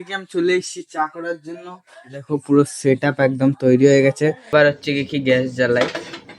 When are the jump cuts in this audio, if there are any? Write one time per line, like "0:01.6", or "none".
0:04.4